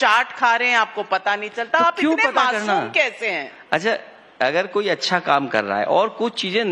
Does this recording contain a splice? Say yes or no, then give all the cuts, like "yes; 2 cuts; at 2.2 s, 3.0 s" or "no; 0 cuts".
yes; 1 cut; at 4.7 s